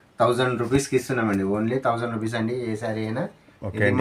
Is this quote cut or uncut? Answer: uncut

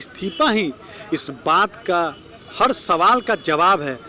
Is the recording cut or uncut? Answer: uncut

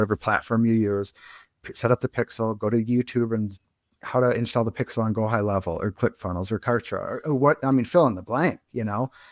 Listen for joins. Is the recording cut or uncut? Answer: uncut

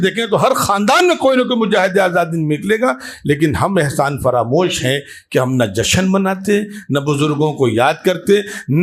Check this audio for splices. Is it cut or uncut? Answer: uncut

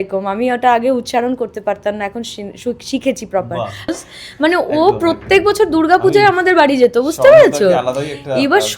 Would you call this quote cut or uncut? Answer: cut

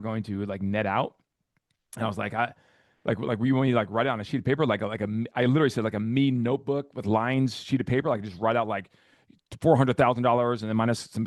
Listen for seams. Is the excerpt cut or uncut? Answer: uncut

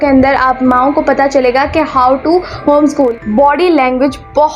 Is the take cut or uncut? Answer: cut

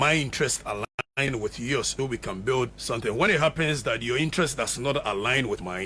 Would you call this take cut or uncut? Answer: cut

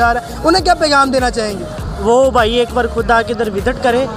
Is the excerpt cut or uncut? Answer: uncut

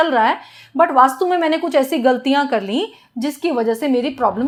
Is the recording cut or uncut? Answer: uncut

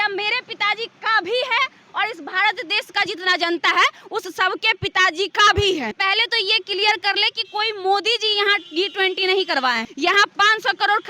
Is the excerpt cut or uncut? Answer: cut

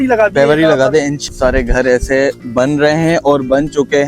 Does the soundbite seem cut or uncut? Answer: cut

